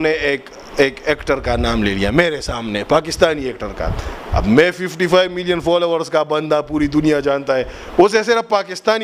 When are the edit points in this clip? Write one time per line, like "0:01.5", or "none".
none